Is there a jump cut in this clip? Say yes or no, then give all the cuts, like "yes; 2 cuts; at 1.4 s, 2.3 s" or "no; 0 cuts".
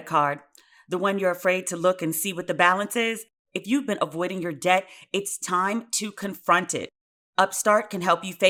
no; 0 cuts